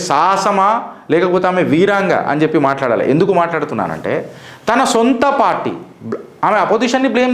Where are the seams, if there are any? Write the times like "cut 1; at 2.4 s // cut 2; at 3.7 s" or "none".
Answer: none